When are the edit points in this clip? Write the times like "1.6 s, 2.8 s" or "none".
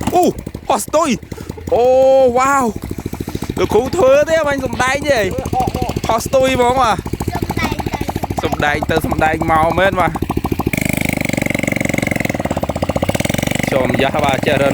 10.7 s